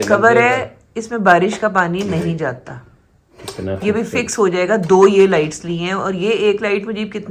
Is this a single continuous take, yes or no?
yes